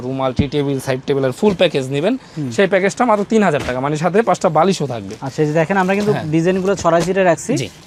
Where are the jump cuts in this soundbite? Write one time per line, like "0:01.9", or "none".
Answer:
none

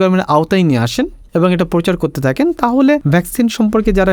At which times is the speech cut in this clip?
0:01.2
0:03.0

